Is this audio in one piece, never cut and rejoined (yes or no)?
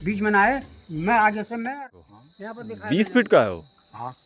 no